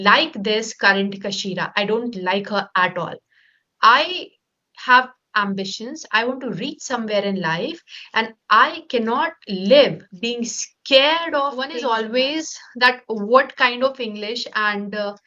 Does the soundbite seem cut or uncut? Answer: cut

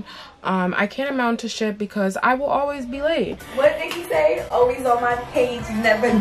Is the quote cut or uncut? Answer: cut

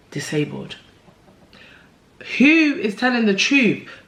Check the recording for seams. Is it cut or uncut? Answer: uncut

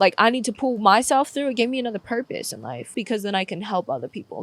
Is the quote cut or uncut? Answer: cut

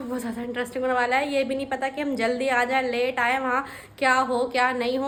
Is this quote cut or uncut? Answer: uncut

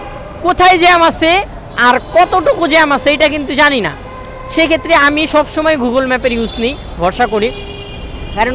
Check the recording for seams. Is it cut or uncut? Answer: uncut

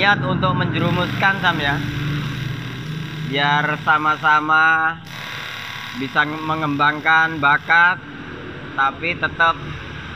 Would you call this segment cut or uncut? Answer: uncut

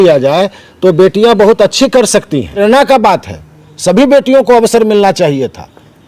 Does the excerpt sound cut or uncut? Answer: cut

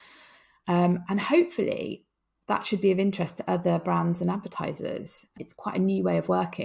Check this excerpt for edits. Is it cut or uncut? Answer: cut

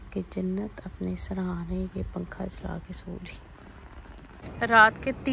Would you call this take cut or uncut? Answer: cut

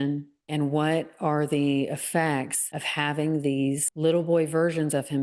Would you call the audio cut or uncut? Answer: uncut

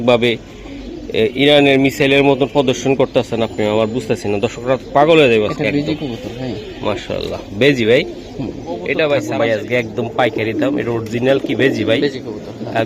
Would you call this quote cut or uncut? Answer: cut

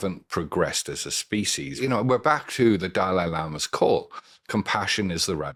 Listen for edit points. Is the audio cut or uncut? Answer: uncut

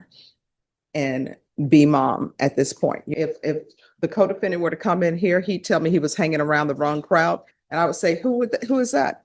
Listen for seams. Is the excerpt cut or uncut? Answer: cut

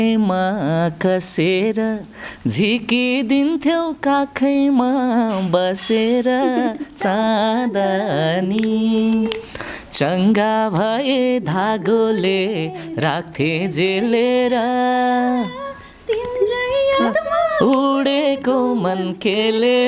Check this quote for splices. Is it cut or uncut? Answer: uncut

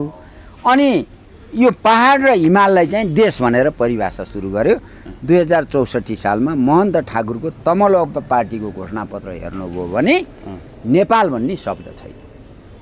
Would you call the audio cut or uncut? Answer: uncut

